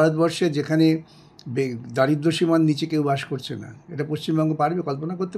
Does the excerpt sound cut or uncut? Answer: uncut